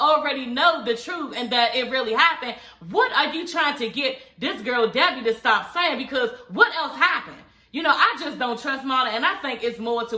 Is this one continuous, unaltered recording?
yes; 0 cuts

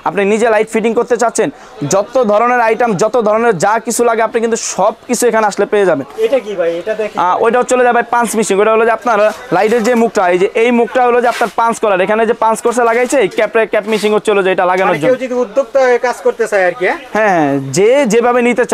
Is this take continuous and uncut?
yes; 0 cuts

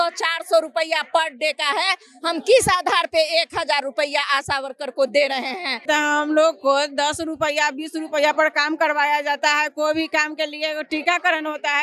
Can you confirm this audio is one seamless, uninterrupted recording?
no; 1 cut; at 5.8 s

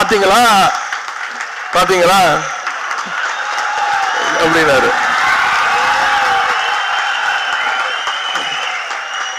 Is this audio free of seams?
yes; 0 cuts

